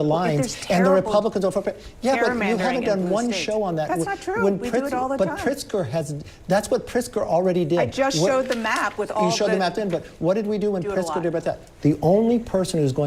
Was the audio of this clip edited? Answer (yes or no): yes